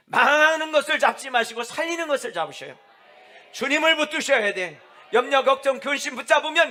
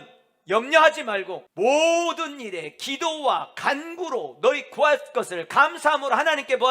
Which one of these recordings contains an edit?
second; 1 cut; at 1.4 s

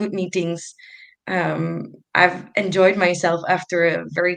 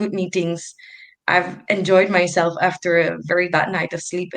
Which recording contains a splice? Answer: second; 1 cut; at 1.1 s

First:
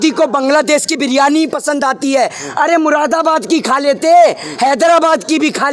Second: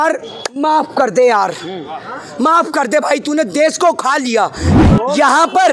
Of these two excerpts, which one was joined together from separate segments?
second; 1 cut; at 4.7 s

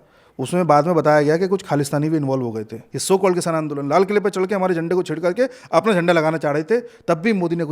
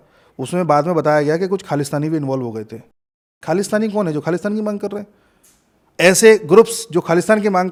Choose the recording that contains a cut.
first; 1 cut; at 2.9 s

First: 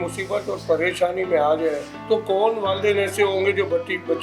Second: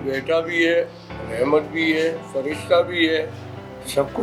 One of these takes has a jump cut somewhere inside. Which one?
first; 1 cut; at 1.9 s

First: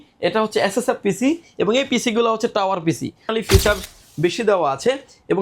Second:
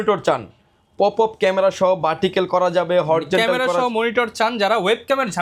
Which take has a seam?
first; 1 cut; at 3.3 s

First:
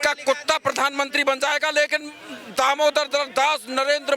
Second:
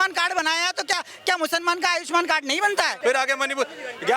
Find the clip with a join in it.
second; 1 cut; at 2.9 s

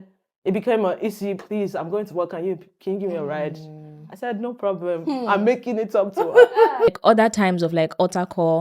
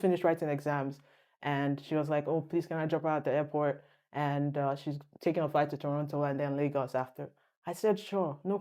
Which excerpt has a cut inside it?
first; 1 cut; at 7.0 s

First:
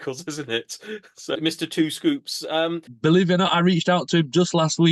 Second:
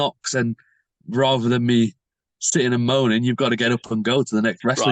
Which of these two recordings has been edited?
first; 2 cuts; at 1.3 s, 2.9 s

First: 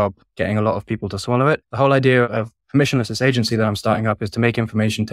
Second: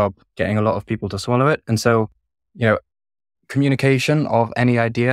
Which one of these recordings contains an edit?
first; 2 cuts; at 1.6 s, 2.3 s

